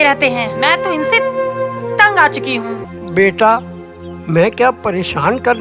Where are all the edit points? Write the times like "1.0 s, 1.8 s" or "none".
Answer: 2.9 s